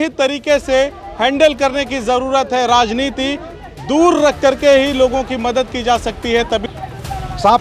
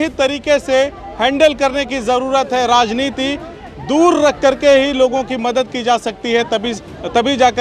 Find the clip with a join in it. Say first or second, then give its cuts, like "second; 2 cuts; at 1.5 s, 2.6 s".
first; 1 cut; at 6.7 s